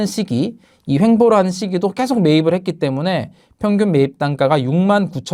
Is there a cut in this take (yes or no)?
no